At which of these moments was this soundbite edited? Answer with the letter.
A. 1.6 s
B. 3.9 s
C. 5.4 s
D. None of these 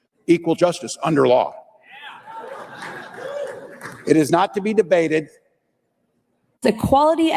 D